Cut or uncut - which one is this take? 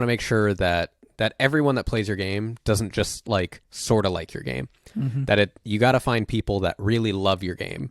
cut